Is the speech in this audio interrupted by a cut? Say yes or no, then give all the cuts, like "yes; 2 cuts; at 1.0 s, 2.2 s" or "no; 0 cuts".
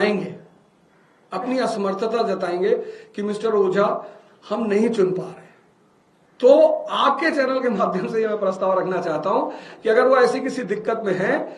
no; 0 cuts